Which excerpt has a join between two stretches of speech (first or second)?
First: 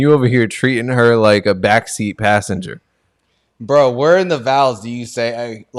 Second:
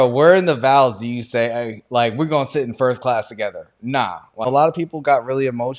second